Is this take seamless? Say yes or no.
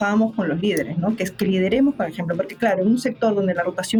yes